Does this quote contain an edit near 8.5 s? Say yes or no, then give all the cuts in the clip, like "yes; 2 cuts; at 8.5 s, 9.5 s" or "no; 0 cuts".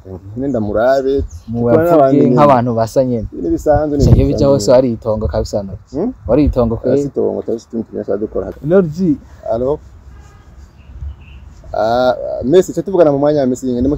yes; 1 cut; at 8.5 s